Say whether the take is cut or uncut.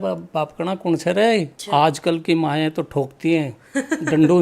cut